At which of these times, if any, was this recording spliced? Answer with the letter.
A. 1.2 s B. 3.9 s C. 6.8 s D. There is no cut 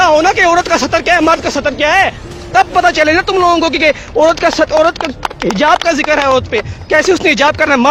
D